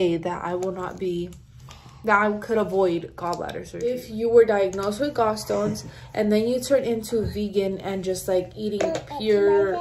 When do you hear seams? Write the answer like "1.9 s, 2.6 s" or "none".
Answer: 3.7 s